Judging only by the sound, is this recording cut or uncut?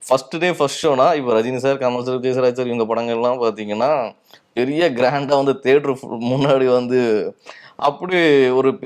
uncut